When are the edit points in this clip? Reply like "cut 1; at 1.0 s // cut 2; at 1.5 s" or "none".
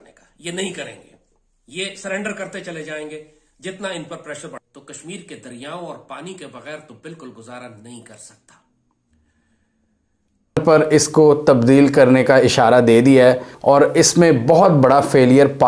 cut 1; at 4.6 s // cut 2; at 10.6 s